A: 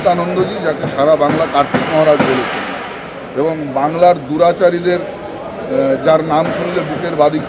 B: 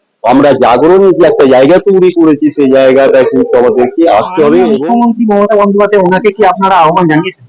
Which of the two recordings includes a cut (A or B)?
B